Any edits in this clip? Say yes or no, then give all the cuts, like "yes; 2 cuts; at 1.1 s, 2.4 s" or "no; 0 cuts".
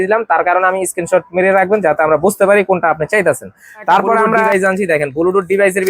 yes; 1 cut; at 4.5 s